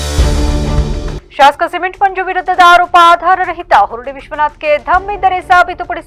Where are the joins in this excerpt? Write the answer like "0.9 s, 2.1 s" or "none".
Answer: 1.2 s